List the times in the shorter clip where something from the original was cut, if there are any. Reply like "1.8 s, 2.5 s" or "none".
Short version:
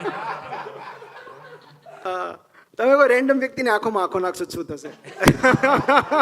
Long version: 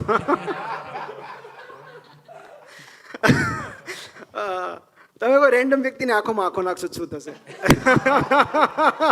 2.0 s

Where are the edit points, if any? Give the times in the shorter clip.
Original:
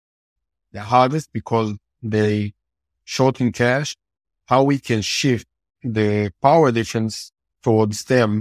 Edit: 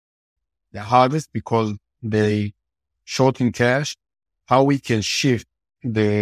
none

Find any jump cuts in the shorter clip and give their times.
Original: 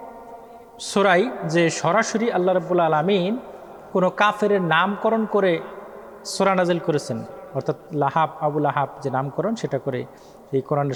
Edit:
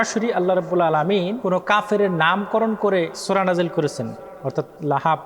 1.4 s, 3.2 s

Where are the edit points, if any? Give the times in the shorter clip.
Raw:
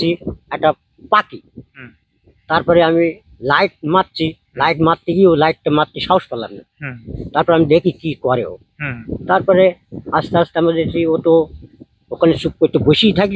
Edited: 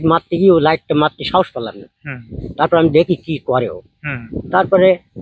none

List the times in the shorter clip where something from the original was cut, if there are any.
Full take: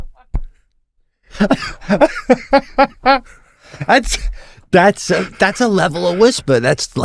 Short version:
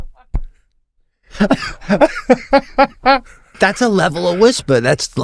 3.5 s

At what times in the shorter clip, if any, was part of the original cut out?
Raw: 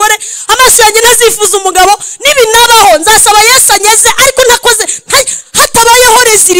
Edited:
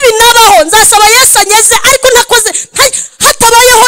none

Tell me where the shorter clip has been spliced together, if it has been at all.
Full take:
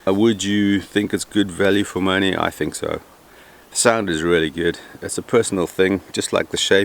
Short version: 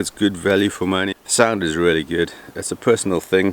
1.1 s

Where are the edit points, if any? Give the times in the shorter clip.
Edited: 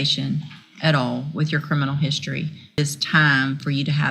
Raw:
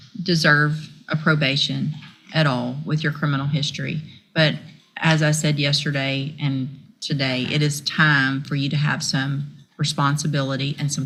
2.8 s

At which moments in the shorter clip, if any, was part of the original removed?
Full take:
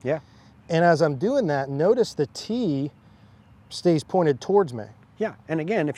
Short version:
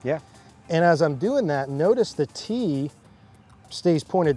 none

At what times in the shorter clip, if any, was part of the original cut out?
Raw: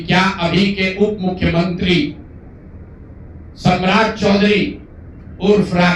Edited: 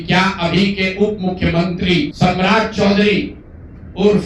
2.1 s

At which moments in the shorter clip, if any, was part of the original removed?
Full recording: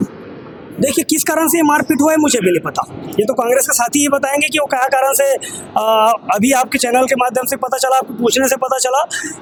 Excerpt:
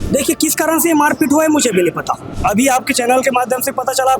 2.4 s

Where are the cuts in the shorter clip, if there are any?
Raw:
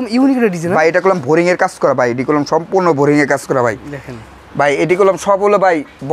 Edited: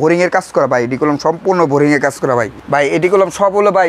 2.6 s

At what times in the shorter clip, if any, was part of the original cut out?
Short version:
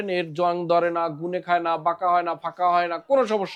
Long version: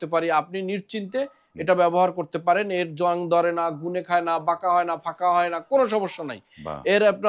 none

